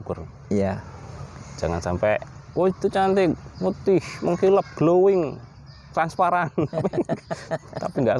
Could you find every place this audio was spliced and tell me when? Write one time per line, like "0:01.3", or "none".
none